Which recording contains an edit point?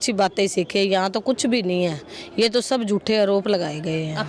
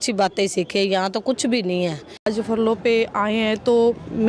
second; 1 cut; at 2.2 s

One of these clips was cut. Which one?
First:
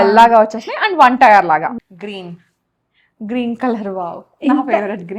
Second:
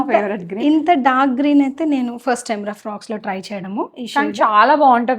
first; 1 cut; at 1.7 s

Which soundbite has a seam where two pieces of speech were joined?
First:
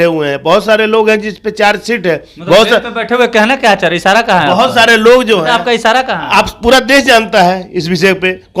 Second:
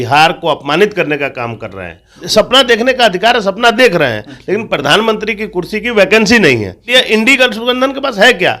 second; 2 cuts; at 2.2 s, 6.9 s

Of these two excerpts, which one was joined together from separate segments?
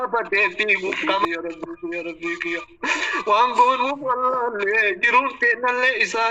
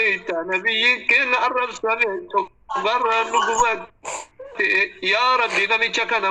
first; 1 cut; at 1.2 s

